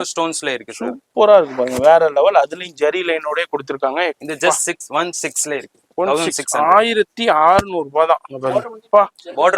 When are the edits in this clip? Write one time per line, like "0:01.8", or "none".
0:04.2